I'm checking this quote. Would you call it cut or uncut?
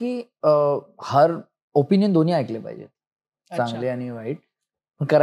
uncut